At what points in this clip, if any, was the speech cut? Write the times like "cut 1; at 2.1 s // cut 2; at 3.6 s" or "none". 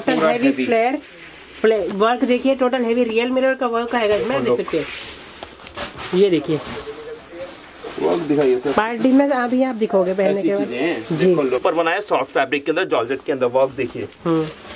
cut 1; at 11.6 s